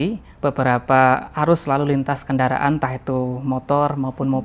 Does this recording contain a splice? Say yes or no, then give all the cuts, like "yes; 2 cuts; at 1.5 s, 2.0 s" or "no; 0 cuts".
no; 0 cuts